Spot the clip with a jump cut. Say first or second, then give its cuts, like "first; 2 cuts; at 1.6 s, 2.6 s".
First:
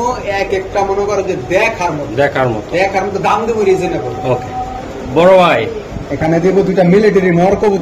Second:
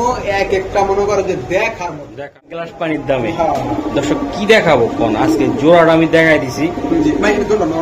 second; 1 cut; at 2.1 s